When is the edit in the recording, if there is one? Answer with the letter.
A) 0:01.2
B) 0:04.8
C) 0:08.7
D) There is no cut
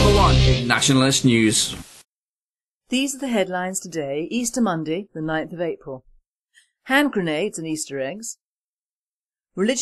C